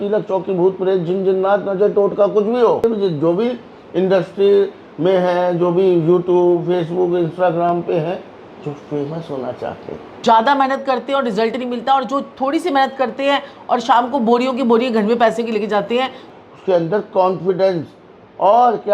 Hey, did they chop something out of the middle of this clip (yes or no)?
yes